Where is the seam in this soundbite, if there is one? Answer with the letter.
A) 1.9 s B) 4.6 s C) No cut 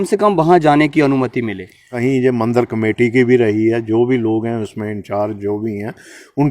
A